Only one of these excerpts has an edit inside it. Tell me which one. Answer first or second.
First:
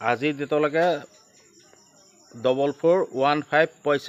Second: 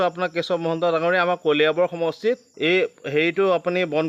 second